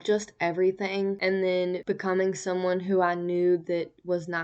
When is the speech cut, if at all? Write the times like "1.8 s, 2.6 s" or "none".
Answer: 1.2 s, 1.8 s